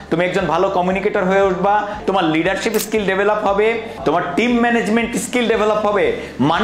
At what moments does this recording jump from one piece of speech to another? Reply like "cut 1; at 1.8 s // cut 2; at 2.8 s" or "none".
cut 1; at 2.0 s // cut 2; at 3.9 s

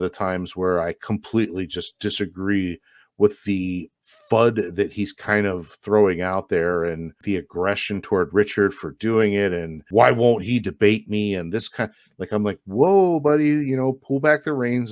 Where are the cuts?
cut 1; at 7.2 s // cut 2; at 9.8 s

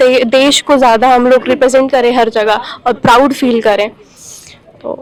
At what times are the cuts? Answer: none

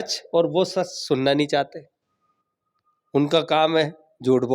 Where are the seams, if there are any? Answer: none

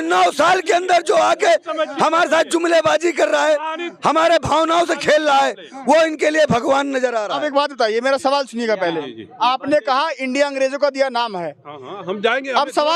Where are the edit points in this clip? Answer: none

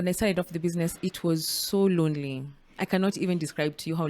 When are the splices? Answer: none

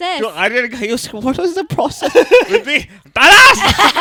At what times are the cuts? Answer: none

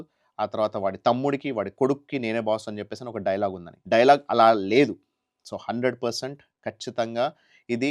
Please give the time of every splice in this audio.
cut 1; at 3.7 s

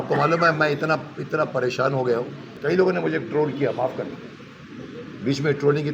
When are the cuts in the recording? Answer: cut 1; at 2.5 s

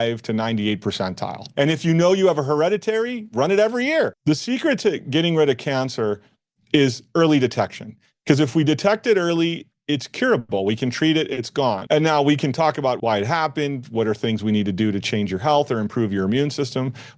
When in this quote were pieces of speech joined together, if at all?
cut 1; at 1.5 s // cut 2; at 4.2 s // cut 3; at 11.8 s // cut 4; at 13.0 s

